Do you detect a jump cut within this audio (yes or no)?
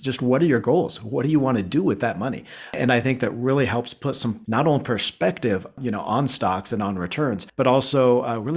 yes